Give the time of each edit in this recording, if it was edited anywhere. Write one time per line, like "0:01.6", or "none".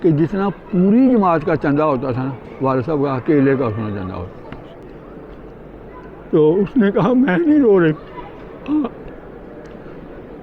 0:04.8